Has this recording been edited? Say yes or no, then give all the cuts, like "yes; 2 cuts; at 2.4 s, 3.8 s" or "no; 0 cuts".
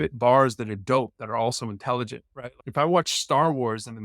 yes; 1 cut; at 2.6 s